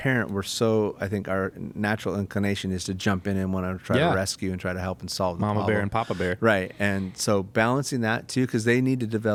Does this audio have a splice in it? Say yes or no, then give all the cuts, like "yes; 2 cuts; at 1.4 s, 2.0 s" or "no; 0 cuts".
no; 0 cuts